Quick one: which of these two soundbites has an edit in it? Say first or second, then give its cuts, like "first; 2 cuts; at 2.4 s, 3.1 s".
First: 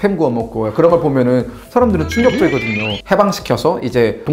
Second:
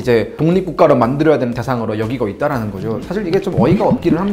first; 1 cut; at 3.0 s